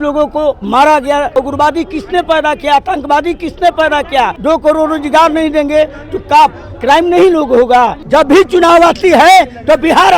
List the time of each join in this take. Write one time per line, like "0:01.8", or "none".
0:01.4
0:04.4
0:08.0